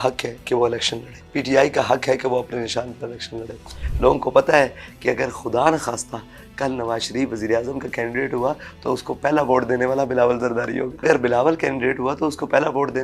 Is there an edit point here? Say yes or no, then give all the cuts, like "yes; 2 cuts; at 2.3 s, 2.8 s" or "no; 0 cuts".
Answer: yes; 3 cuts; at 1.2 s, 3.8 s, 11.0 s